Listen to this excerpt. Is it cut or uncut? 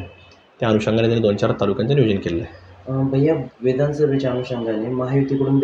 uncut